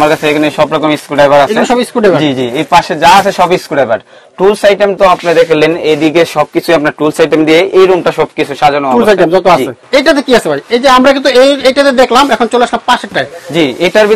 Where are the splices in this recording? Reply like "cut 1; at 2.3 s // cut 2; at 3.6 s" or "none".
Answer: none